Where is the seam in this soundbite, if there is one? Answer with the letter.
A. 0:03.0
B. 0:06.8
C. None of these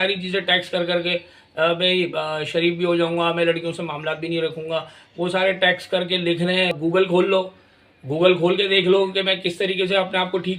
B